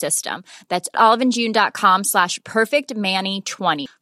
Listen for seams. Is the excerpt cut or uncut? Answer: uncut